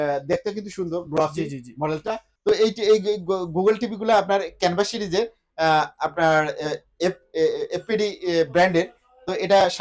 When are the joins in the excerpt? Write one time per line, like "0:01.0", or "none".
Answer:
0:02.3